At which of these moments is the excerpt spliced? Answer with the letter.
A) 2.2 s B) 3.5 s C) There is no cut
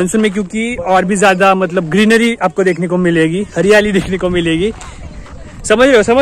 C